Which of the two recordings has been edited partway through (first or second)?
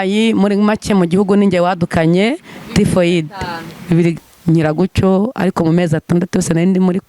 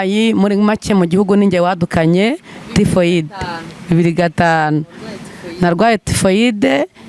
first